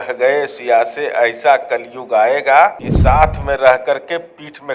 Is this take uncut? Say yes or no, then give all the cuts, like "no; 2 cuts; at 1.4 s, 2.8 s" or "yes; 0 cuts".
no; 1 cut; at 2.9 s